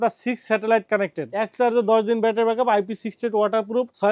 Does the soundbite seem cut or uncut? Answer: cut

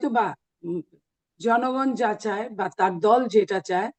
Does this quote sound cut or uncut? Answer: uncut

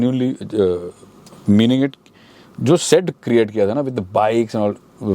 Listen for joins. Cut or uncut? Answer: uncut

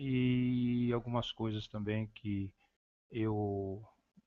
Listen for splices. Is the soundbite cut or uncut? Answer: uncut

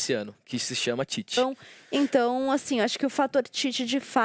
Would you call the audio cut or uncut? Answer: cut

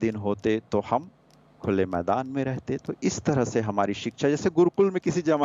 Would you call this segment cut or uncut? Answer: uncut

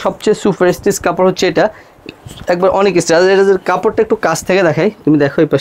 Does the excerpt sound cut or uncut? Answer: uncut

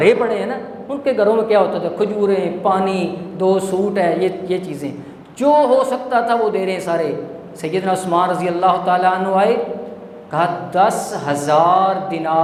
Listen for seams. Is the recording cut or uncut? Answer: uncut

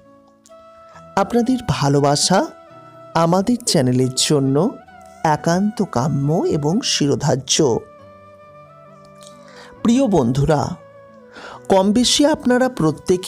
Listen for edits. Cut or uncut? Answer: cut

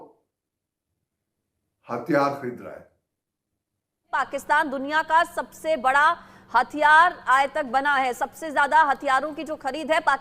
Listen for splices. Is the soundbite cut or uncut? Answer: cut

